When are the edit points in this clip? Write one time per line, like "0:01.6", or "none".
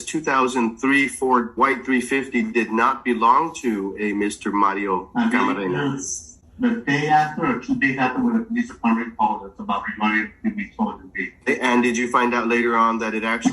0:01.5
0:05.1
0:11.4